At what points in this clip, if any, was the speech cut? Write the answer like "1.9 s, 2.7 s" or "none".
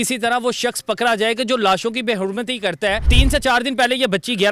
3.1 s